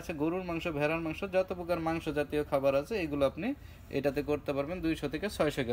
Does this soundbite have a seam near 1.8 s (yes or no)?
no